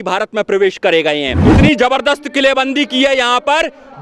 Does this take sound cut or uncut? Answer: cut